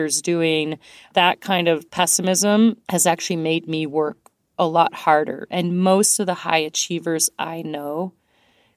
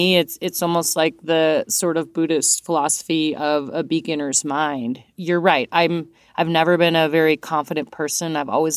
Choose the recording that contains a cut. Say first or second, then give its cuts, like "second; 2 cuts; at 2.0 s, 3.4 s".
first; 3 cuts; at 1.0 s, 1.9 s, 2.8 s